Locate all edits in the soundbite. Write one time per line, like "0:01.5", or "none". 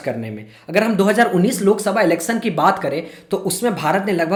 none